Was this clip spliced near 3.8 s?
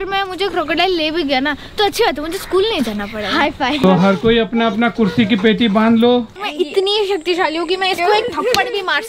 yes; 2 cuts; at 3.8 s, 6.3 s

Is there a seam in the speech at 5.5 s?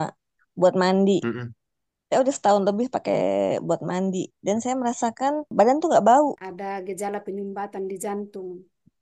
yes; 2 cuts; at 5.5 s, 6.5 s

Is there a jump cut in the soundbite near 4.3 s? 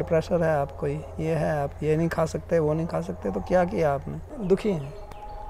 yes; 1 cut; at 4.3 s

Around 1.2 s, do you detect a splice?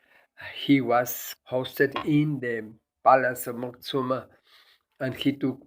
yes; 1 cut; at 1.2 s

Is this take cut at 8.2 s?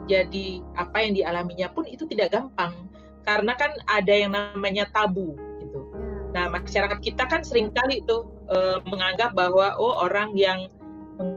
no; 0 cuts

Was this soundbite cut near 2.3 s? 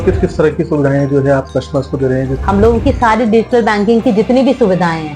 yes; 1 cut; at 2.3 s

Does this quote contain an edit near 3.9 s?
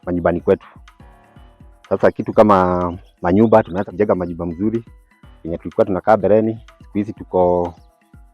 yes; 1 cut; at 3.9 s

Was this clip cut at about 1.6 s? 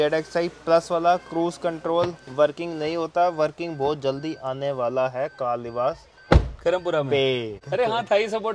no; 1 cut; at 7.6 s

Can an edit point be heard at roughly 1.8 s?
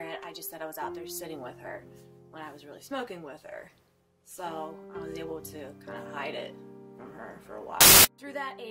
yes; 1 cut; at 1.8 s

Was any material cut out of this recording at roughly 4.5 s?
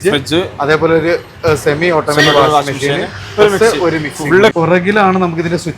yes; 1 cut; at 4.5 s

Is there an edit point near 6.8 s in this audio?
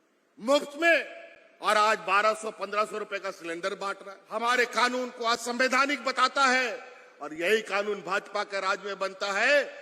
no; 1 cut; at 4.1 s

